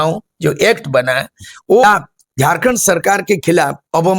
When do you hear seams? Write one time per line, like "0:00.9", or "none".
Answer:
0:01.8